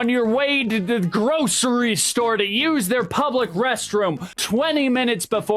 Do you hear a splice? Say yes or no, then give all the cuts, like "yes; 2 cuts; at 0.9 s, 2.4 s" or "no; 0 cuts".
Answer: yes; 1 cut; at 4.3 s